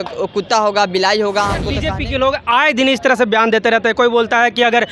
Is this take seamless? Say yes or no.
no